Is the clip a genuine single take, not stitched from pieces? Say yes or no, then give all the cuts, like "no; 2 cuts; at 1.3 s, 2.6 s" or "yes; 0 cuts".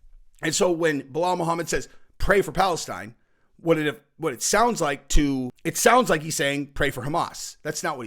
no; 1 cut; at 5.6 s